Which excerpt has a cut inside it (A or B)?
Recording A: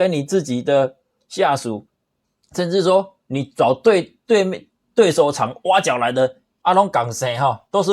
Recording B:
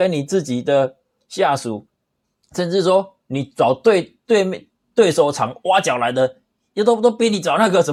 A